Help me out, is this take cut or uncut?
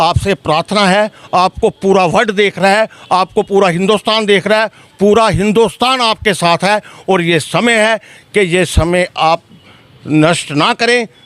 uncut